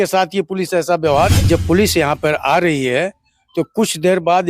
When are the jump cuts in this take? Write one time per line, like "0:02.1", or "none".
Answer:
0:01.4